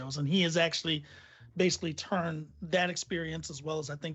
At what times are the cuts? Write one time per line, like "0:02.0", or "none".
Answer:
none